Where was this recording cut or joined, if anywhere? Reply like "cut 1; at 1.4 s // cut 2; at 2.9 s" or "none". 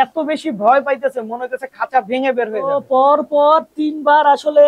cut 1; at 2.8 s